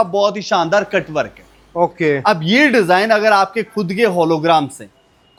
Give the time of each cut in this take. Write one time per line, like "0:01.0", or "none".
none